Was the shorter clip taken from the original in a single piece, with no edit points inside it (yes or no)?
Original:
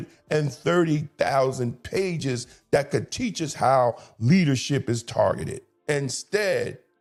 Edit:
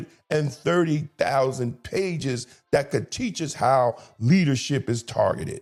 yes